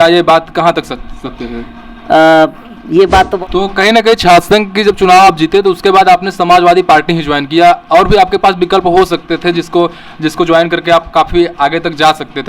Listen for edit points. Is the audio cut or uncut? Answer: cut